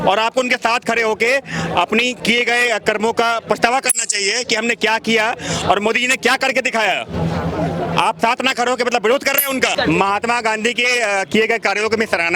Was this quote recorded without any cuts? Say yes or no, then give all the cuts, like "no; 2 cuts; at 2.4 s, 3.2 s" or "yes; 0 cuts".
no; 1 cut; at 9.7 s